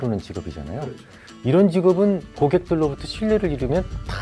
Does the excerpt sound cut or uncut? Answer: uncut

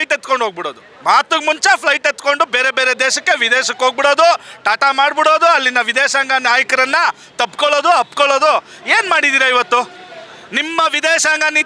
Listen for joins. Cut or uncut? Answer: uncut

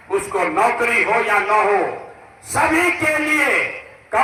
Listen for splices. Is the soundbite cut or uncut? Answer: uncut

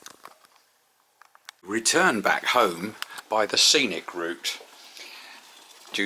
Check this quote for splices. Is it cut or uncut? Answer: cut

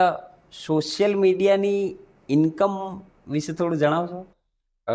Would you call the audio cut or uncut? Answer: uncut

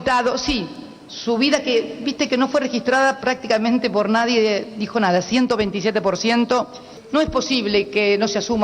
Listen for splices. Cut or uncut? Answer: cut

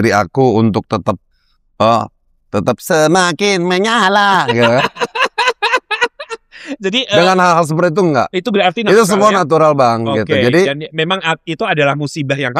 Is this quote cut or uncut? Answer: uncut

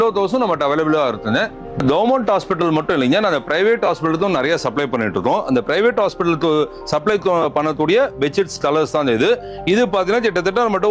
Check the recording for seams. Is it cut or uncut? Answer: uncut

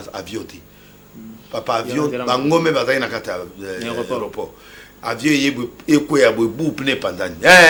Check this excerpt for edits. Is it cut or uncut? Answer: uncut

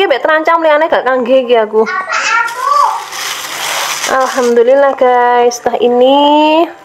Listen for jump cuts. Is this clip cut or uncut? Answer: uncut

